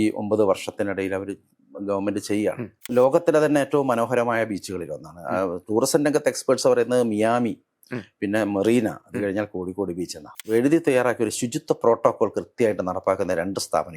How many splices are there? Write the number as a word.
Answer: two